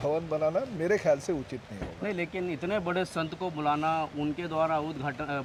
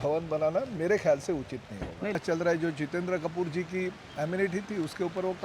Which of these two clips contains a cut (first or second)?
second